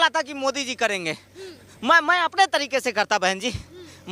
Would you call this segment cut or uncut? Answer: uncut